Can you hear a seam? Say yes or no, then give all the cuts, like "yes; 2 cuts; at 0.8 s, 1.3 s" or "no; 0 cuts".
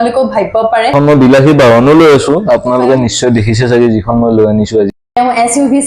yes; 2 cuts; at 0.9 s, 5.0 s